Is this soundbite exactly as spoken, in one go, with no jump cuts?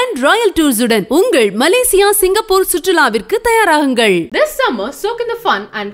yes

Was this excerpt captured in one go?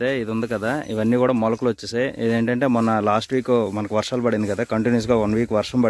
yes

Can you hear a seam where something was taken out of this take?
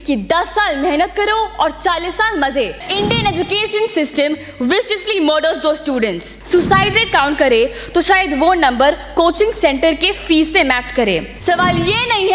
yes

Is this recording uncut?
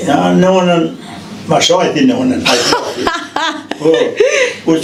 yes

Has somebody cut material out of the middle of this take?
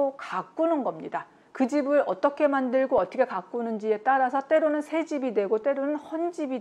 no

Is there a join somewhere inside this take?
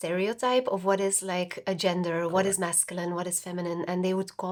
no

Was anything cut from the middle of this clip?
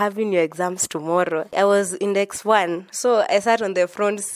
yes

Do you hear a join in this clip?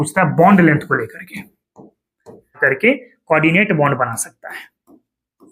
yes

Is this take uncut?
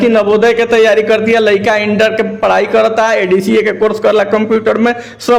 yes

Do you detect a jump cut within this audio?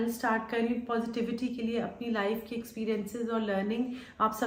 no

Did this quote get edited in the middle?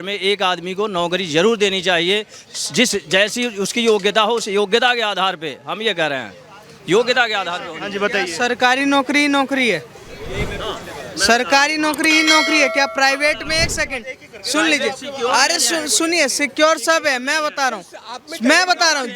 no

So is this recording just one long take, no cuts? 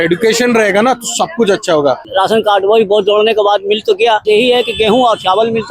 no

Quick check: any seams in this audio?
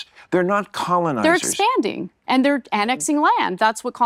no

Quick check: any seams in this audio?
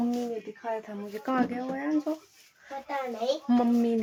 no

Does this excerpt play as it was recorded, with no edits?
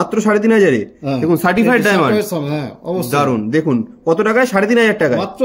yes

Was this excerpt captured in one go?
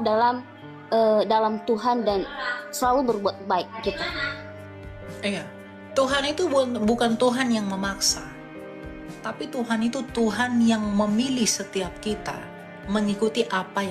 yes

